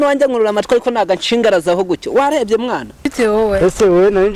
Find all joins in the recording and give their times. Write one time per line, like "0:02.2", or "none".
0:03.1